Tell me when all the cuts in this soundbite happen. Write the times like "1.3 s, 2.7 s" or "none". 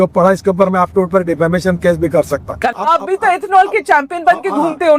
2.5 s